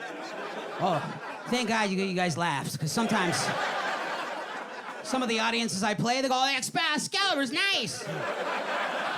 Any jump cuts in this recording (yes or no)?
no